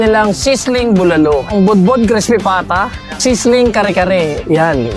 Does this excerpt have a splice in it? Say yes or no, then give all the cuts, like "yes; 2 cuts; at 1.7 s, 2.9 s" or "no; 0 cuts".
yes; 2 cuts; at 1.5 s, 3.0 s